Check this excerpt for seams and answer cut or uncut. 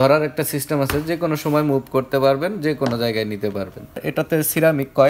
cut